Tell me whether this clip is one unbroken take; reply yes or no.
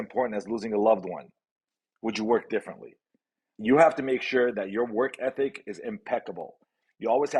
yes